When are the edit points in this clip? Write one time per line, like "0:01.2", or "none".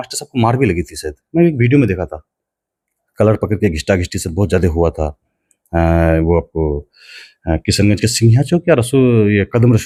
none

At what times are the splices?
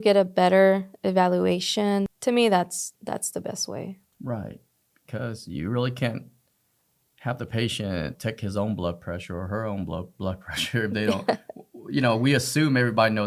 0:02.1
0:08.2

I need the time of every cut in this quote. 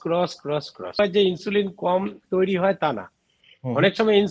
0:01.0

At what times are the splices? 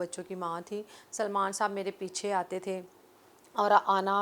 none

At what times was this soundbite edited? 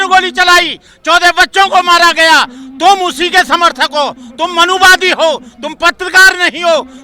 none

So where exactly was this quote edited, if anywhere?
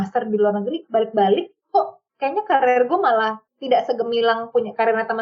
none

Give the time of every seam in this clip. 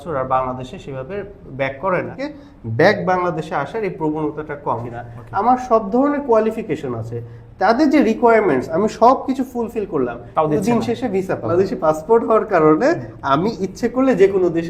0:02.1
0:04.9
0:11.5

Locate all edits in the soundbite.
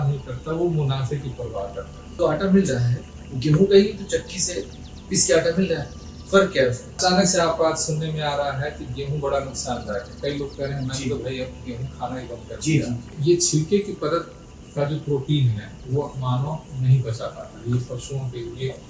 0:02.1
0:07.0
0:13.1

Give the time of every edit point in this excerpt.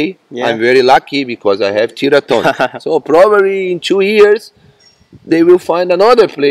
none

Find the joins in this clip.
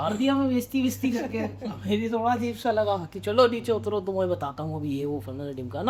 none

